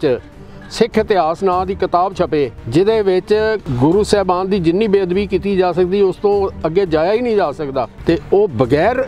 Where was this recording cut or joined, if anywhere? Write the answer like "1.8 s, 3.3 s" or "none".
2.6 s, 3.7 s, 7.9 s